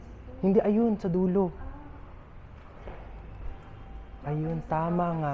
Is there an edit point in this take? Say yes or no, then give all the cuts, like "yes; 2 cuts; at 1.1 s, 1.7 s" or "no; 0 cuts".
no; 0 cuts